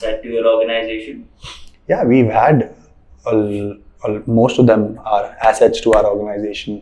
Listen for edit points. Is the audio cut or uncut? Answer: uncut